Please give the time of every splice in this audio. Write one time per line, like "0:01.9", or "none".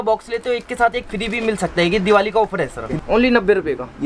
0:02.9